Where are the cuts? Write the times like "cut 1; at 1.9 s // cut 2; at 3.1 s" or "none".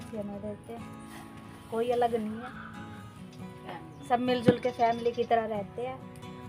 cut 1; at 2.5 s // cut 2; at 3.6 s